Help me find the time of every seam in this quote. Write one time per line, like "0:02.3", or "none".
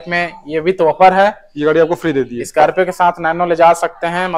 none